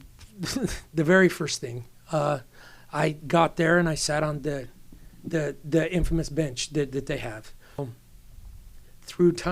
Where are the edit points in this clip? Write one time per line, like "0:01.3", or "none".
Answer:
0:07.8